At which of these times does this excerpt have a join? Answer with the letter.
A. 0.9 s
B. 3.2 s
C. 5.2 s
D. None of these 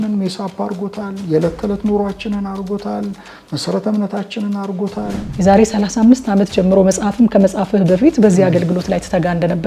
C